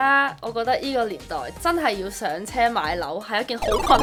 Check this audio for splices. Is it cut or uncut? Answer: uncut